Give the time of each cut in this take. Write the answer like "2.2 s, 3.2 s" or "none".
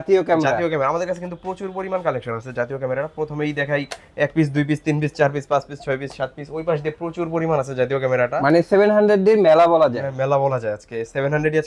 none